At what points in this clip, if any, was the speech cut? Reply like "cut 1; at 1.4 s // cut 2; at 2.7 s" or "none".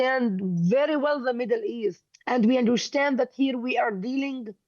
cut 1; at 2.1 s